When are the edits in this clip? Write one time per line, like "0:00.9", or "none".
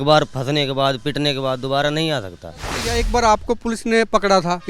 0:02.8